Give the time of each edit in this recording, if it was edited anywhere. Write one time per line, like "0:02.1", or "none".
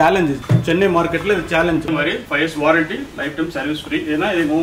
0:01.8